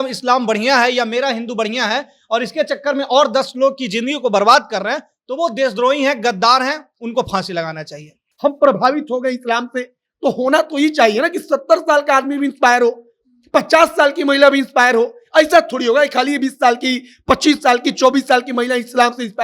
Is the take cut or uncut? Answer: cut